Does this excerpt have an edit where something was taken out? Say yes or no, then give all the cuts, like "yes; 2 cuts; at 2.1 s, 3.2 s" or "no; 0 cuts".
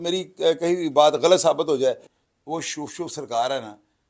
yes; 1 cut; at 2.1 s